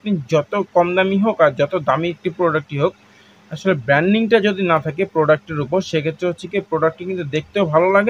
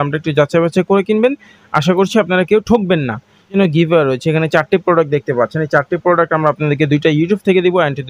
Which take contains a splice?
second; 1 cut; at 3.6 s

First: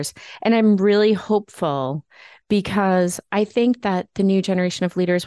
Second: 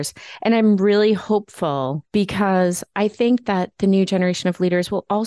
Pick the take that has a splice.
second; 1 cut; at 2.0 s

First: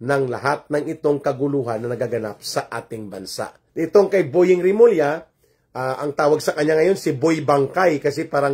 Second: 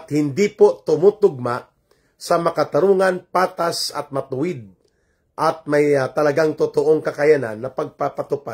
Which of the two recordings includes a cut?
first; 1 cut; at 3.6 s

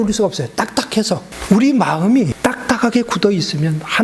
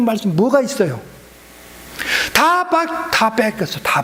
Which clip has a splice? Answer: first; 2 cuts; at 1.3 s, 2.3 s

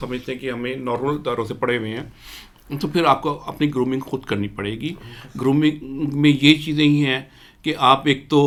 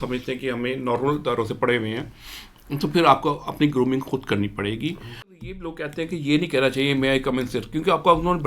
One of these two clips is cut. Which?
second; 1 cut; at 5.4 s

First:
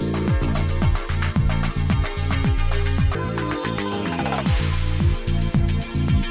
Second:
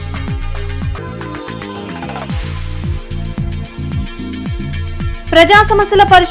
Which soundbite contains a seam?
second; 1 cut; at 5.1 s

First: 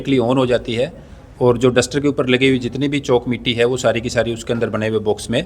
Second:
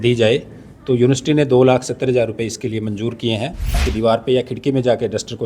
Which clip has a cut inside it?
second; 1 cut; at 3.9 s

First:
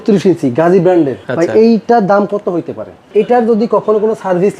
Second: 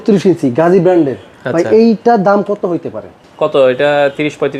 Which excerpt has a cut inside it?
first; 2 cuts; at 1.2 s, 3.1 s

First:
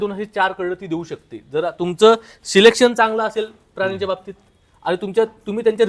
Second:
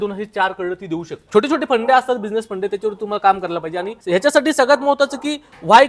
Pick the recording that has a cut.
second; 2 cuts; at 1.2 s, 3.9 s

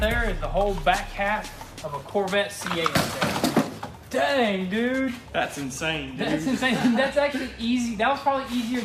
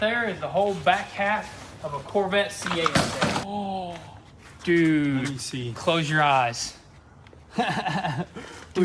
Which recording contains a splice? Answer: second; 1 cut; at 3.4 s

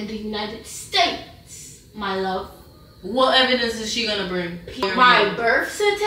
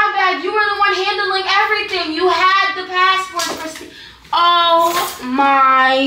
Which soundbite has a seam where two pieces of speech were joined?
first; 1 cut; at 4.8 s

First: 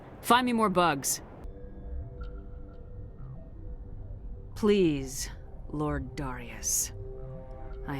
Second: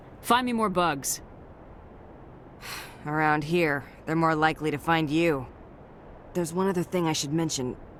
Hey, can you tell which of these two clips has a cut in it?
first; 1 cut; at 1.4 s

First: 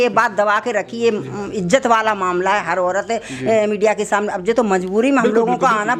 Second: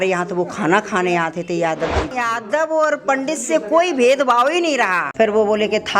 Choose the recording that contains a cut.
second; 2 cuts; at 2.1 s, 5.0 s

